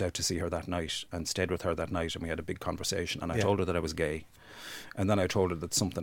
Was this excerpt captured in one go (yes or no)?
yes